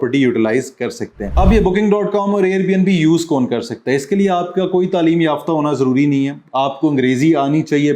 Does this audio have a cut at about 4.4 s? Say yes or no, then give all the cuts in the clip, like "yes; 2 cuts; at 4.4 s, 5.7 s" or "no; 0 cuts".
no; 1 cut; at 1.2 s